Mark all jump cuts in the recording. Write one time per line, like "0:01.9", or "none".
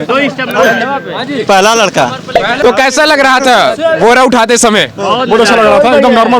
0:02.6